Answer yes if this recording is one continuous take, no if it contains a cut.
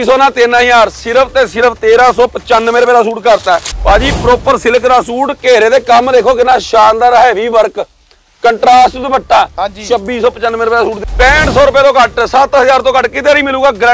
no